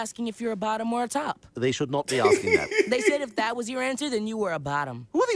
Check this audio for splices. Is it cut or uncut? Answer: uncut